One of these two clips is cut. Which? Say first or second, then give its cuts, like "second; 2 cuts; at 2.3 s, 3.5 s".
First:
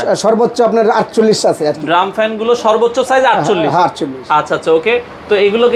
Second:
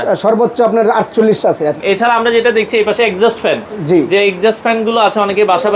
second; 1 cut; at 1.8 s